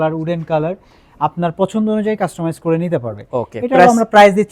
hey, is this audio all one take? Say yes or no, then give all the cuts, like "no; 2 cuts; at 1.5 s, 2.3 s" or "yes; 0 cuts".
yes; 0 cuts